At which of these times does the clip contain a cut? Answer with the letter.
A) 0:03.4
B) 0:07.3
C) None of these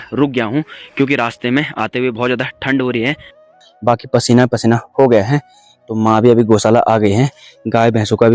A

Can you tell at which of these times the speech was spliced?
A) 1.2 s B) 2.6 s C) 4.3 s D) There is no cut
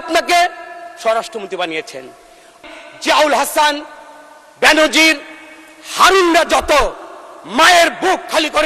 B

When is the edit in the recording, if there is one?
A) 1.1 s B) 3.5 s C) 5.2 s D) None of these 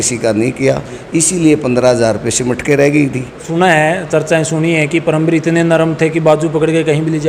B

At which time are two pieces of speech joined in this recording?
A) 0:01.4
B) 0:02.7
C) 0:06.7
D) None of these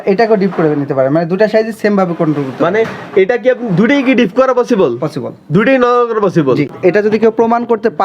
C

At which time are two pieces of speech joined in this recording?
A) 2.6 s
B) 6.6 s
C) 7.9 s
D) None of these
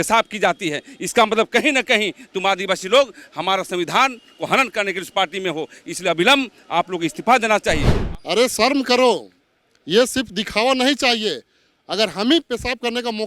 C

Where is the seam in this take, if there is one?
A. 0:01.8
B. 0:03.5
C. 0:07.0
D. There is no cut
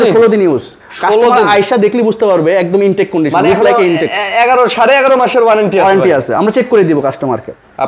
D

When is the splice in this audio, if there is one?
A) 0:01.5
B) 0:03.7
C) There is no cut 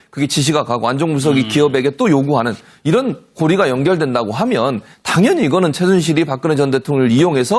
C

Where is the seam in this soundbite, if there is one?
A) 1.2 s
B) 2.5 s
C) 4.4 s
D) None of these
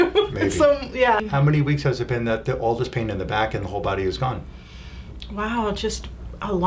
A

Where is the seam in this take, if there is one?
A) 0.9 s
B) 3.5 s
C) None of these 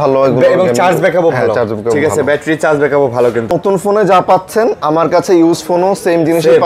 B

